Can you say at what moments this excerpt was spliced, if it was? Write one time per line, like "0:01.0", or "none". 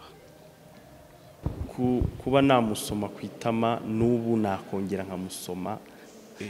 0:01.5